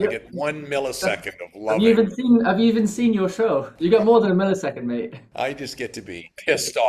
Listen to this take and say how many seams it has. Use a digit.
0